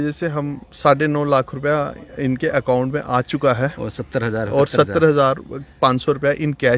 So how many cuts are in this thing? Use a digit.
0